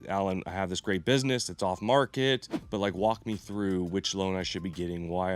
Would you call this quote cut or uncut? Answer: cut